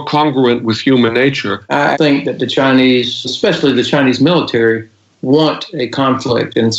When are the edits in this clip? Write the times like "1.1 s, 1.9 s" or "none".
1.8 s